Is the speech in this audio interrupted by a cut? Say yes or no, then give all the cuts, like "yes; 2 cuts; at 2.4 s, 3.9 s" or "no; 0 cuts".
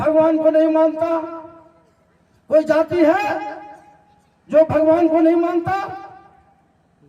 no; 0 cuts